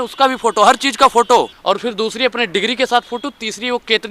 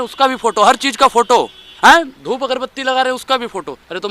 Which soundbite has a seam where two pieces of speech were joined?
first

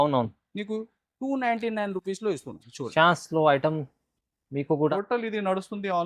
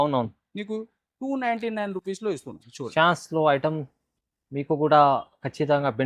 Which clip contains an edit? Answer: first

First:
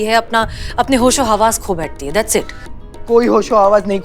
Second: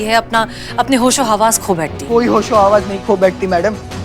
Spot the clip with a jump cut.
second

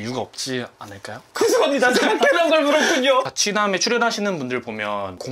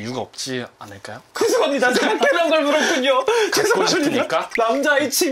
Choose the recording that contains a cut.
first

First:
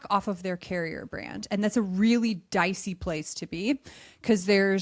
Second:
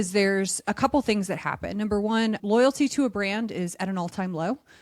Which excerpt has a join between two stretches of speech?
second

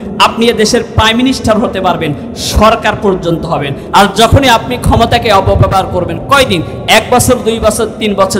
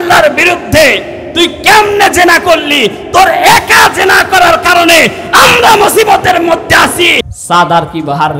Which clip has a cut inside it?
second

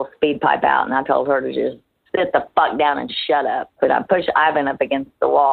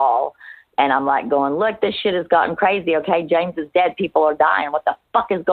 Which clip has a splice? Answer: first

